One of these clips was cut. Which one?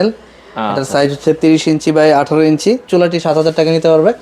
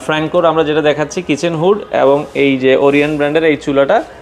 first; 1 cut; at 2.8 s

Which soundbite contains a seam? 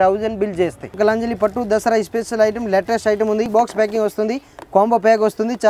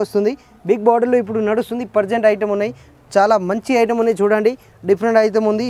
first; 2 cuts; at 0.9 s, 3.5 s

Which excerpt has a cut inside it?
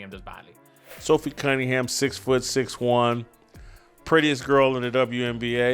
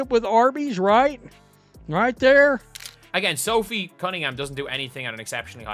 first; 1 cut; at 0.9 s

